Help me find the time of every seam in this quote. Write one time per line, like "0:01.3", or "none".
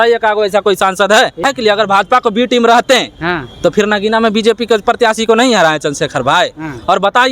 0:01.4